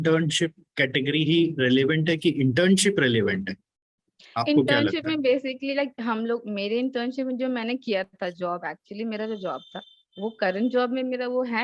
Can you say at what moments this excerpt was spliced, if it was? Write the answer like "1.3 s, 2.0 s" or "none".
none